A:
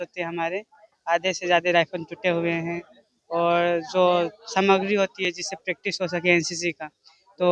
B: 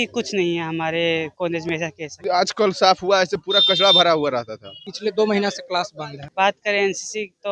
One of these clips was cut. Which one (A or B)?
B